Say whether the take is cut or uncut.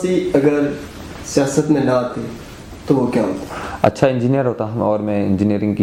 uncut